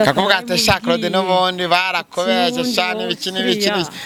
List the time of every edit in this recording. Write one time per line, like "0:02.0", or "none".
none